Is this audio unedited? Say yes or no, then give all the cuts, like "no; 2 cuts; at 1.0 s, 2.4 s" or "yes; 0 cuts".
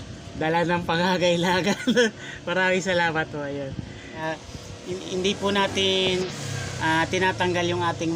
no; 1 cut; at 4.2 s